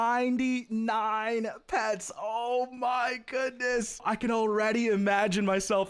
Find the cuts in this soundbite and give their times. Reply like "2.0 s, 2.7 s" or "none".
4.0 s

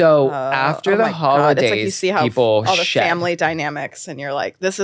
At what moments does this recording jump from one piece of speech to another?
none

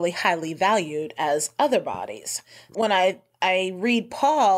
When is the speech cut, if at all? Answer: 2.7 s

